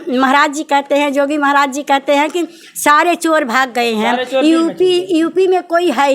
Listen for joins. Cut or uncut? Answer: uncut